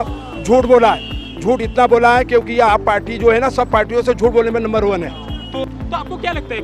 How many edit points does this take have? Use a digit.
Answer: 0